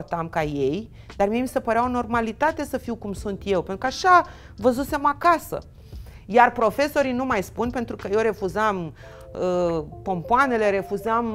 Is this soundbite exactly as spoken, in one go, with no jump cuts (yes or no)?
yes